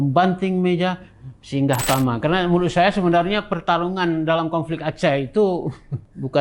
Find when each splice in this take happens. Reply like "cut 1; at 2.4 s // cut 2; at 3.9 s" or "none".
cut 1; at 1.8 s

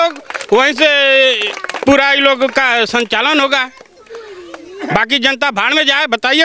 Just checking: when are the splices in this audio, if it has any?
none

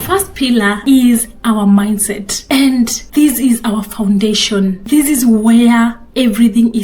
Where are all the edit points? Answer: cut 1; at 0.8 s // cut 2; at 2.3 s // cut 3; at 3.0 s // cut 4; at 4.8 s

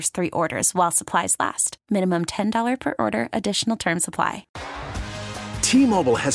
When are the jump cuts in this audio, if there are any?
cut 1; at 4.5 s

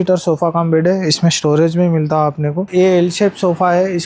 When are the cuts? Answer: cut 1; at 2.6 s

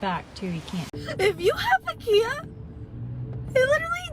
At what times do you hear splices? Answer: cut 1; at 0.9 s

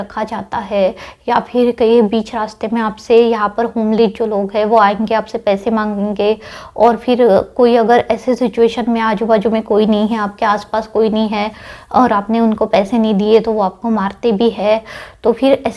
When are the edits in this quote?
none

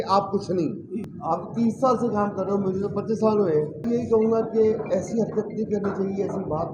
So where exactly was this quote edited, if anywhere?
cut 1; at 1.0 s // cut 2; at 3.8 s

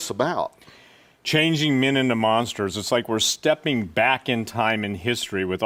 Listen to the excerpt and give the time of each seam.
none

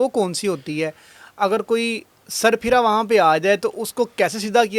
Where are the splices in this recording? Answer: none

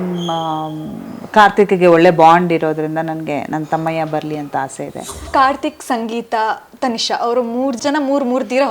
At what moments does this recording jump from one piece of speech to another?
cut 1; at 5.3 s // cut 2; at 7.8 s

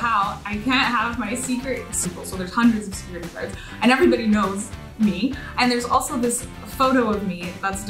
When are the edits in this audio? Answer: cut 1; at 1.9 s

